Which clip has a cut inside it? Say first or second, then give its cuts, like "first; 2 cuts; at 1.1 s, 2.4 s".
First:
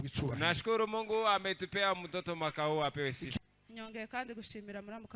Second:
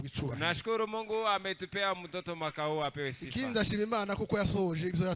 first; 1 cut; at 3.3 s